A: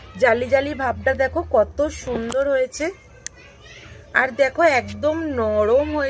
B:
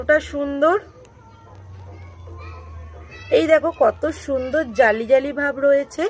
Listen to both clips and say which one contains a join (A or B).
B